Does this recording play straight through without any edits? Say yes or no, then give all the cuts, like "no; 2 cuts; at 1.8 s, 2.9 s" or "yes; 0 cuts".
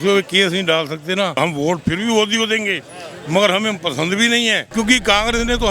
no; 2 cuts; at 1.4 s, 4.6 s